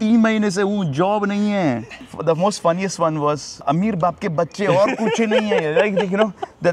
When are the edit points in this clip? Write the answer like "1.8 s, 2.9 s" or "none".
1.9 s, 3.6 s